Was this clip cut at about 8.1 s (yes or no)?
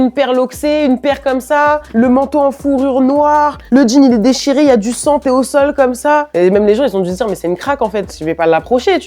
yes